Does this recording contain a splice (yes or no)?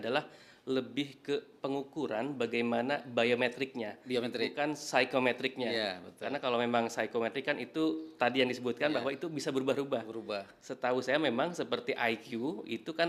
no